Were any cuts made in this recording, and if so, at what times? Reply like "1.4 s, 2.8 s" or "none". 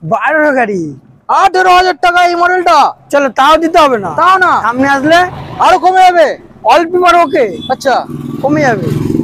none